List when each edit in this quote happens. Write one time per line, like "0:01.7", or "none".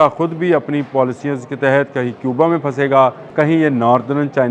0:03.2